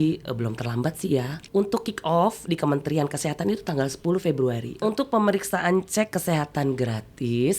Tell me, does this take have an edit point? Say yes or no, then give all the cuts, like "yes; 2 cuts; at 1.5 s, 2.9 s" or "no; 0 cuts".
yes; 2 cuts; at 1.4 s, 4.8 s